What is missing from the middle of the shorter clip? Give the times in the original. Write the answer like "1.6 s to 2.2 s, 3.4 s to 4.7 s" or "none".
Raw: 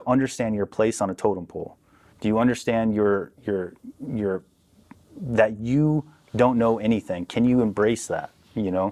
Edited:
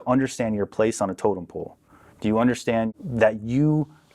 2.9 s to 5.1 s